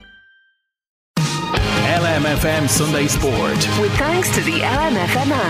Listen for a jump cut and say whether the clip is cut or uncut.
cut